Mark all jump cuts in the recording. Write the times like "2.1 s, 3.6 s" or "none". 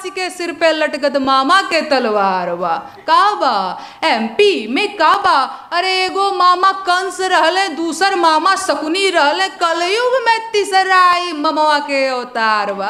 none